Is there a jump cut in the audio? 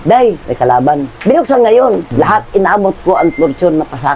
yes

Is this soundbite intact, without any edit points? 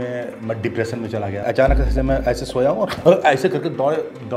no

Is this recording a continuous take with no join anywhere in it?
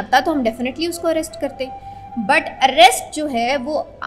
yes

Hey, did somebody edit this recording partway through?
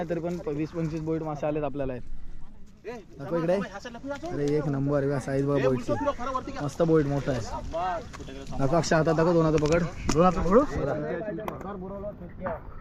no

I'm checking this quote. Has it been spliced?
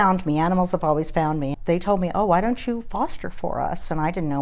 yes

